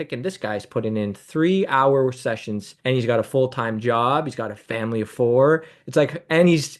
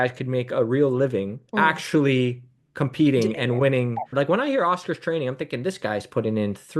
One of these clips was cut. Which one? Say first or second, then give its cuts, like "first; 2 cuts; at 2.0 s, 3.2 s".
second; 2 cuts; at 1.4 s, 4.1 s